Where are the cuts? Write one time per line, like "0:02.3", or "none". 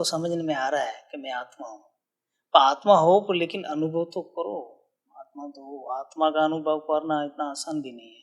none